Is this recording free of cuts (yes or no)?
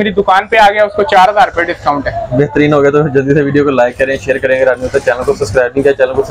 yes